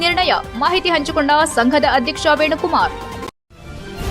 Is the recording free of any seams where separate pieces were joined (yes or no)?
no